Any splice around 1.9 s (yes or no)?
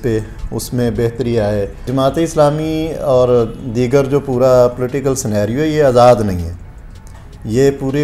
yes